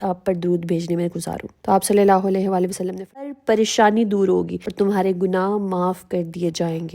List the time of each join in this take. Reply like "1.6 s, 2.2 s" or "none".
3.3 s

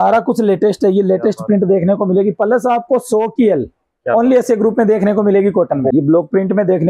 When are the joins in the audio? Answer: 2.4 s, 5.9 s

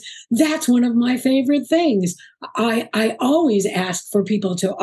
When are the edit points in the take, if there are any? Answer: none

